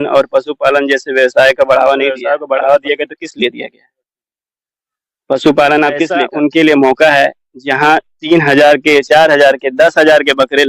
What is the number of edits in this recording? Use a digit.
2